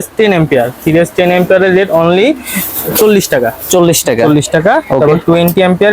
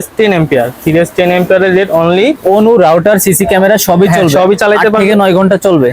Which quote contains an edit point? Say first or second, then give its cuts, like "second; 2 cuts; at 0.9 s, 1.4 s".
second; 1 cut; at 2.4 s